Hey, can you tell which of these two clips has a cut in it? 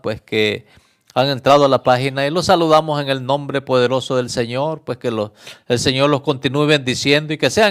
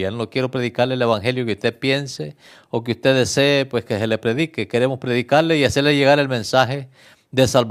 first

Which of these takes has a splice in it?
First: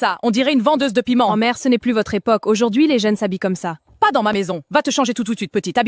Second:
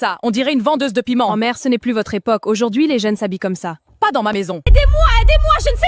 second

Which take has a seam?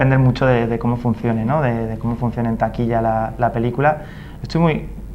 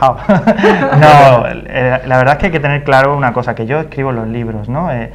first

